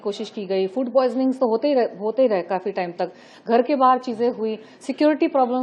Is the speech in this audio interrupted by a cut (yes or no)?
no